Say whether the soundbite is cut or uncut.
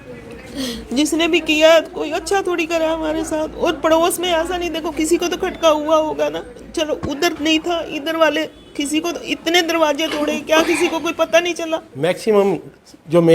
cut